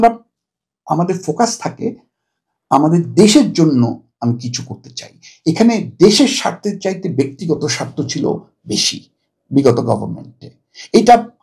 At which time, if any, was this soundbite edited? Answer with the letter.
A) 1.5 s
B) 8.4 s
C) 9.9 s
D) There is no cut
D